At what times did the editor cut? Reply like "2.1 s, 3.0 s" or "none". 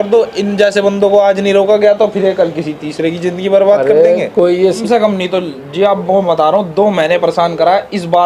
4.8 s